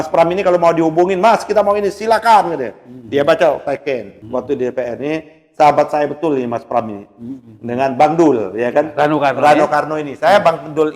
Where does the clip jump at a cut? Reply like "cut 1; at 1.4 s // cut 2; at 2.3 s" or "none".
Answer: cut 1; at 4.2 s